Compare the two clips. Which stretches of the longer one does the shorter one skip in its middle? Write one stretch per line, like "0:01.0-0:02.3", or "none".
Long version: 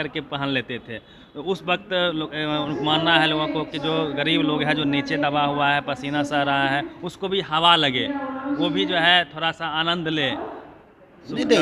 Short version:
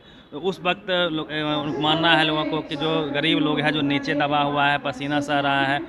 none